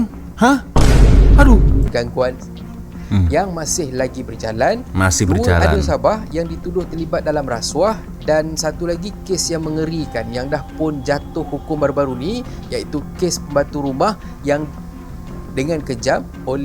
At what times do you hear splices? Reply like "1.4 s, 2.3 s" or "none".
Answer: none